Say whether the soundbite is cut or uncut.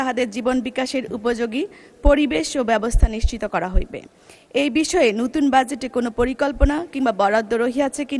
uncut